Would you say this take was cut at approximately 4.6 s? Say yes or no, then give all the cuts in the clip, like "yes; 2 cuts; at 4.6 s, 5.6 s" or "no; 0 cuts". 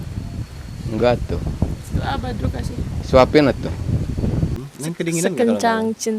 yes; 1 cut; at 4.6 s